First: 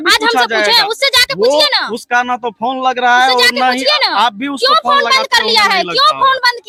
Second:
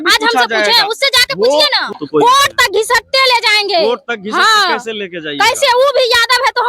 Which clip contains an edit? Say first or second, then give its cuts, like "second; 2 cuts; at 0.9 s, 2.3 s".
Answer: second; 1 cut; at 1.9 s